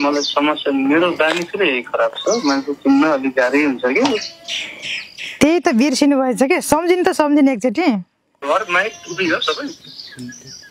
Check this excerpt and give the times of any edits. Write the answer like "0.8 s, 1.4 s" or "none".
8.2 s